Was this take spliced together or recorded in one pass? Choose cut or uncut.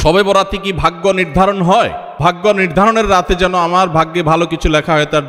uncut